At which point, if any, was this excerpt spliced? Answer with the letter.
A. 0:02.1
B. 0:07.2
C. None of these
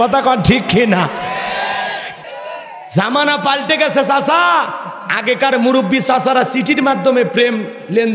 A